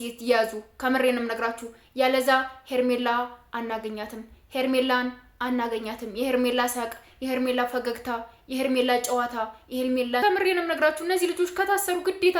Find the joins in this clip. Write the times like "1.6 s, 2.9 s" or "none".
10.2 s